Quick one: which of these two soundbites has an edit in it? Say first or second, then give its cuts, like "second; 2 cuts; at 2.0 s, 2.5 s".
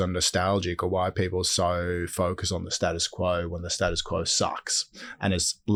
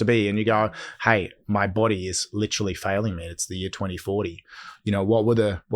second; 1 cut; at 1.4 s